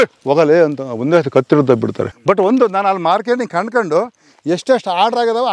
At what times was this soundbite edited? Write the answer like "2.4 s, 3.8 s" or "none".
2.1 s